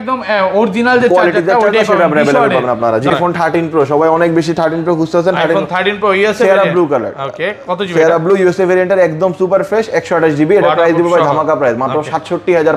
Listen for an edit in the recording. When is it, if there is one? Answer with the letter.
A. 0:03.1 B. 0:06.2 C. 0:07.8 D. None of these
A